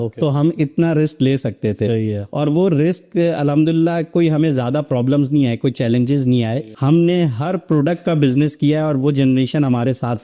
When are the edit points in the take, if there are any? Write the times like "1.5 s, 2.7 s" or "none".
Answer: 6.7 s